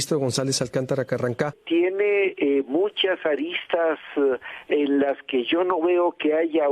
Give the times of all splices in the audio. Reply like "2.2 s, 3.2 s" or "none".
1.6 s

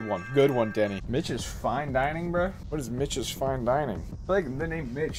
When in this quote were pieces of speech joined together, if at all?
1.0 s, 2.6 s, 4.1 s

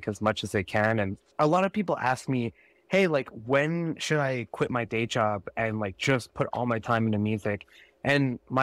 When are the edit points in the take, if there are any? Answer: 1.2 s

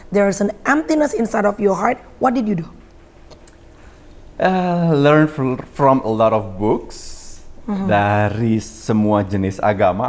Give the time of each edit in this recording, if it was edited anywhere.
none

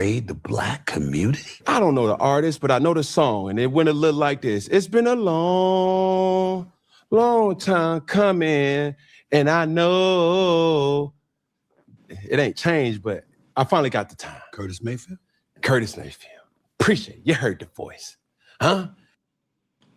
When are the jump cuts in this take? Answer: 1.5 s

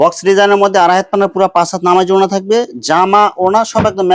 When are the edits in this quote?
none

